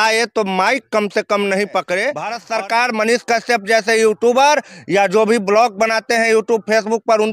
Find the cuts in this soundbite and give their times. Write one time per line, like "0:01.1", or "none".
0:02.4